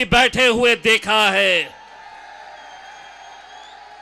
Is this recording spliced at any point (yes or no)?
no